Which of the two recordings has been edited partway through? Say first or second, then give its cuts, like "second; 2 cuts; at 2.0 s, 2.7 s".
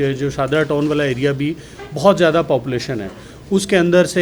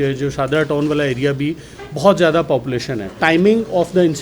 second; 1 cut; at 3.1 s